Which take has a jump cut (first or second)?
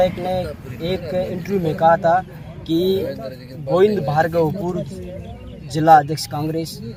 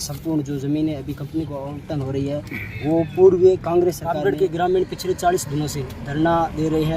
second